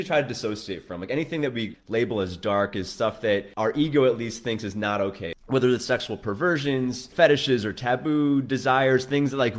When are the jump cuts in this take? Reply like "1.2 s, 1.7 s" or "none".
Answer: 1.8 s, 3.5 s, 5.3 s, 7.1 s